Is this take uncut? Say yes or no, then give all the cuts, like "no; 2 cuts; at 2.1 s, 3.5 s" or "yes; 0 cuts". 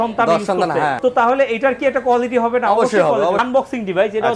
no; 2 cuts; at 1.0 s, 3.4 s